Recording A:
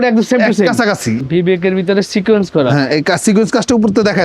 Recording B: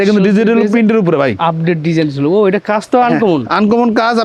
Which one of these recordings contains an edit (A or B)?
A